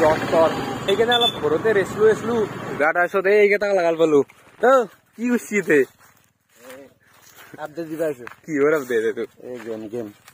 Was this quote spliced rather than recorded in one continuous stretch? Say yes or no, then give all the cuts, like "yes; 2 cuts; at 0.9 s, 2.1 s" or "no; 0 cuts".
yes; 1 cut; at 2.8 s